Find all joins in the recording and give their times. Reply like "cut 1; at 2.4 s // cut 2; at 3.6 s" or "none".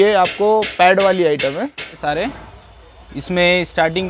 cut 1; at 2.0 s